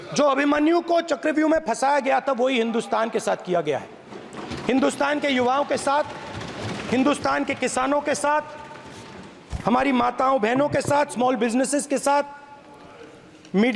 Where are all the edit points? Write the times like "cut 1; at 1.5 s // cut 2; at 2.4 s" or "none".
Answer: none